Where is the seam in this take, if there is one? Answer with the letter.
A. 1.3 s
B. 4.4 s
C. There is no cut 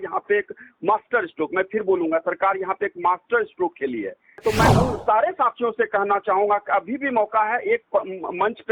B